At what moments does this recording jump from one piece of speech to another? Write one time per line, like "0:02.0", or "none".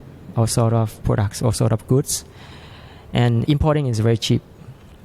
0:01.0
0:03.4